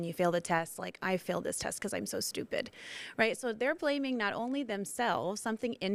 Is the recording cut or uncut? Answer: uncut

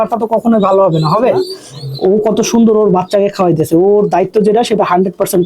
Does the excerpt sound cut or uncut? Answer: cut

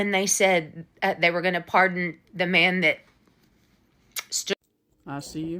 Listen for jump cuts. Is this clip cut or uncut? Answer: cut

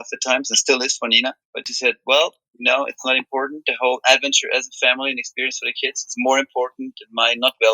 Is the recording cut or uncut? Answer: uncut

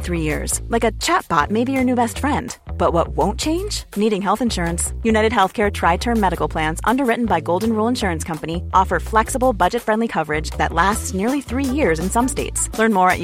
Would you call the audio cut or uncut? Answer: uncut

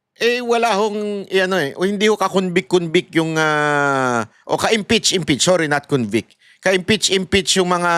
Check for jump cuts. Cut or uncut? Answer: uncut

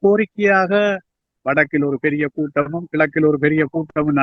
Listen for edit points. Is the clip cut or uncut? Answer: cut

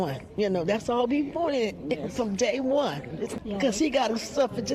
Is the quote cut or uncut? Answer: cut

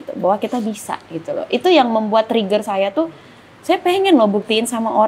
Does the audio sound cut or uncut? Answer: uncut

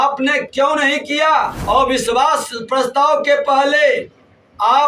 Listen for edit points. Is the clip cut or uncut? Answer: cut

